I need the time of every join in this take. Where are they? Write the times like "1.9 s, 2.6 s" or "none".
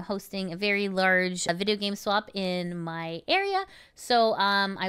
1.5 s